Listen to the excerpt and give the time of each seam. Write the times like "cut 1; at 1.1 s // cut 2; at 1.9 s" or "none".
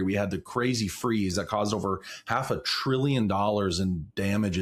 none